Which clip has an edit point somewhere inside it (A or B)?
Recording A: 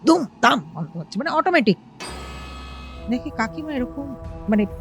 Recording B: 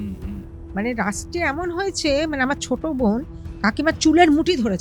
A